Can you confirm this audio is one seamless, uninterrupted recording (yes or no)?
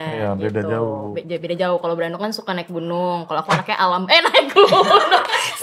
yes